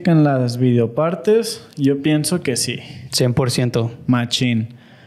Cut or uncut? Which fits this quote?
uncut